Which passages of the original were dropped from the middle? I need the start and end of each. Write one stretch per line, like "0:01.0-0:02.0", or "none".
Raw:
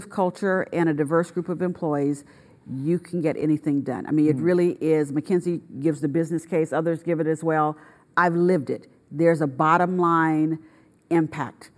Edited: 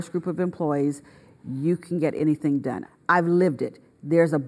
0:04.0-0:07.9